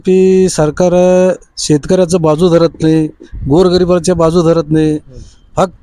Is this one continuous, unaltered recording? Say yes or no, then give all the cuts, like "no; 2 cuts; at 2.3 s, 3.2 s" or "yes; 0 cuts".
yes; 0 cuts